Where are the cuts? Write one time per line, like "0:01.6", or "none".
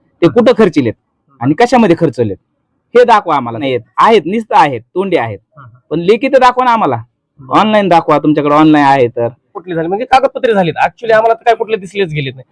0:03.6
0:09.6